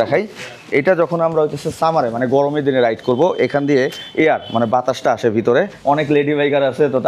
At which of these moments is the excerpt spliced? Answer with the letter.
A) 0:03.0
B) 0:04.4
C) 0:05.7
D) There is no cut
C